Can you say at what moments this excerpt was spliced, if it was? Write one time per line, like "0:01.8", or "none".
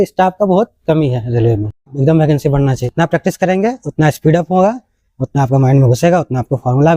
0:01.9
0:02.9